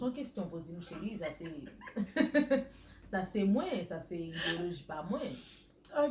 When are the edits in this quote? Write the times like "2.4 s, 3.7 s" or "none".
none